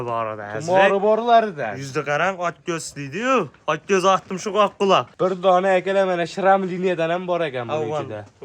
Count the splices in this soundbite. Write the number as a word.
one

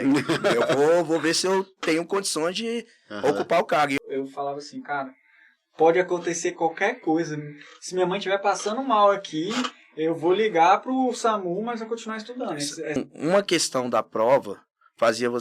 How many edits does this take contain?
two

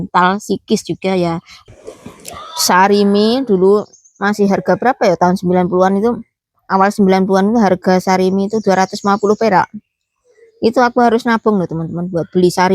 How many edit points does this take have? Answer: one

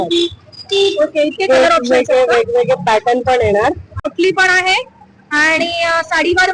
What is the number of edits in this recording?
one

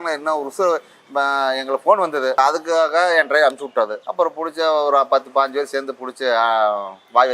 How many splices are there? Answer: two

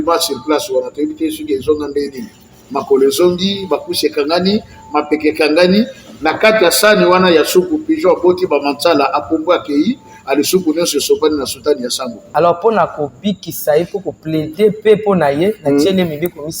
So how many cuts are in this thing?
one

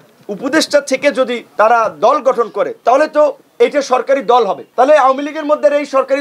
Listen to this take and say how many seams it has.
three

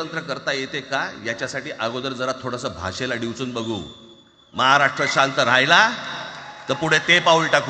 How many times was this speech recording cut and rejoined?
zero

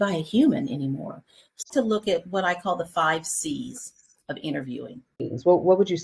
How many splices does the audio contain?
two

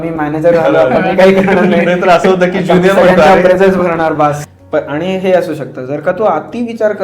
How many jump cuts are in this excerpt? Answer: one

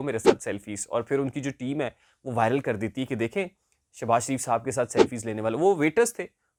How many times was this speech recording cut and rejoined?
zero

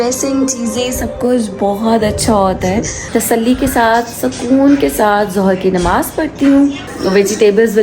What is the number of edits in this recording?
two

